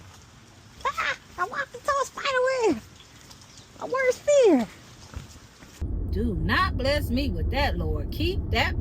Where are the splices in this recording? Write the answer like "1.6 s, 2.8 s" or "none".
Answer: 5.8 s